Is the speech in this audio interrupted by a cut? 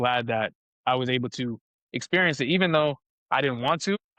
no; 0 cuts

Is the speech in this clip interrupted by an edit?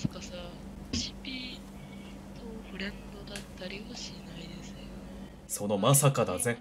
yes; 1 cut; at 0.9 s

